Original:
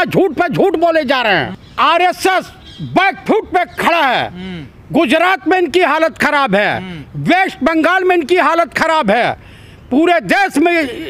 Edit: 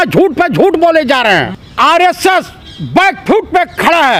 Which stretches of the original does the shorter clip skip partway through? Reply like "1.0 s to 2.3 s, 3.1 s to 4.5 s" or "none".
none